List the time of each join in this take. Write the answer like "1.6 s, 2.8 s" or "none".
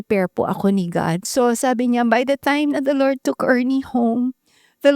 1.2 s

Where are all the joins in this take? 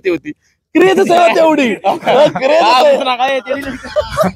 none

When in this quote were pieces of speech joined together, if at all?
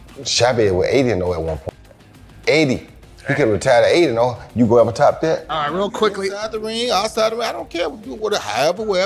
5.5 s

